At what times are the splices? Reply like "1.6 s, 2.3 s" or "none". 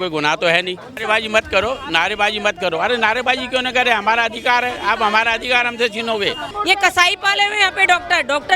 1.0 s, 6.5 s